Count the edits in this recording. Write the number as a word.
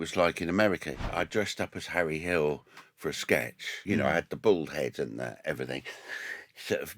two